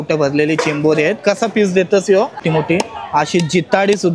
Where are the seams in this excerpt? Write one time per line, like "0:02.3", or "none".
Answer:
0:02.4